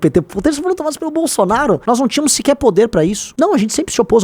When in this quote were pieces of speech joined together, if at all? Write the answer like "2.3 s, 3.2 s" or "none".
1.8 s, 3.2 s